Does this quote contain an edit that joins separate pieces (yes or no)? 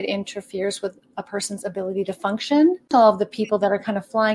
yes